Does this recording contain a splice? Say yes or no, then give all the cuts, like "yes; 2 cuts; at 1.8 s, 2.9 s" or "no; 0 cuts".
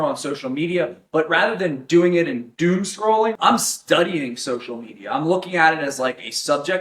yes; 1 cut; at 3.3 s